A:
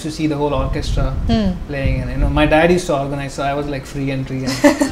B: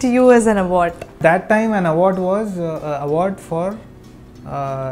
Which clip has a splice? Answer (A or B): B